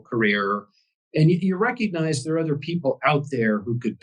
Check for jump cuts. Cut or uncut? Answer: uncut